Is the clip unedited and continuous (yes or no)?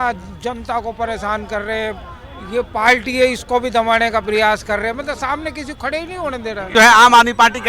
no